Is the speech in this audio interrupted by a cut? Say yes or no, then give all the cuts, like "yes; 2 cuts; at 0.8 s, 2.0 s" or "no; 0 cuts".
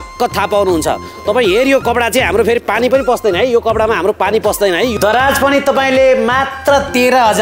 yes; 1 cut; at 5.0 s